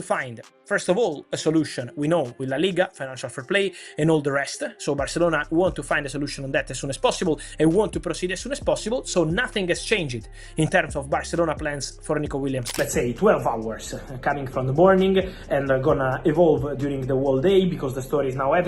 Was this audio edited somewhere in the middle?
yes; 1 cut; at 12.7 s

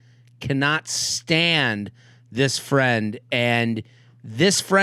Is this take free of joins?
yes; 0 cuts

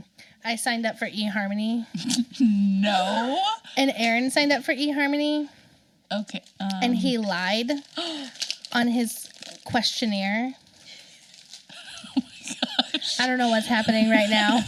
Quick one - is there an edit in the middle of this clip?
no; 0 cuts

